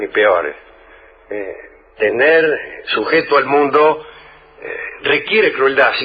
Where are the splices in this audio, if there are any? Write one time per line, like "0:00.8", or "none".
0:02.7